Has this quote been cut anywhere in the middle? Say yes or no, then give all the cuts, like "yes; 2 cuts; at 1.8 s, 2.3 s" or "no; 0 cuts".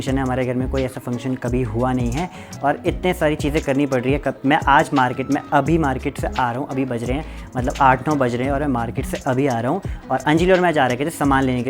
no; 0 cuts